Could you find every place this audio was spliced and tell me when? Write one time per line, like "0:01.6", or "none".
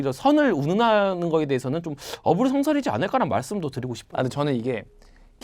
none